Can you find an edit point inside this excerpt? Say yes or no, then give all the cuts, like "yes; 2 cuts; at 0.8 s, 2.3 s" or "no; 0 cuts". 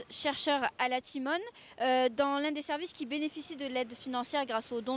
yes; 1 cut; at 1.1 s